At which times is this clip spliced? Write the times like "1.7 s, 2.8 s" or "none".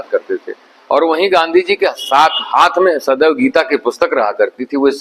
none